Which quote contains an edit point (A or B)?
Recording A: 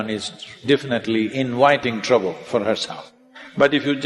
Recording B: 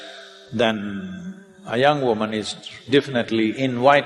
A